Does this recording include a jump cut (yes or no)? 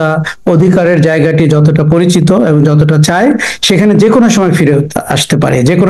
no